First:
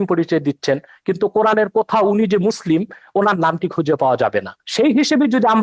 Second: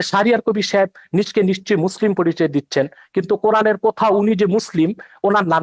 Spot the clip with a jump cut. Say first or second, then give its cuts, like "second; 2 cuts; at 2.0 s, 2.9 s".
first; 1 cut; at 4.6 s